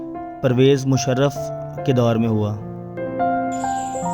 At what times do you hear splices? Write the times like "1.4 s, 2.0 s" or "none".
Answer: none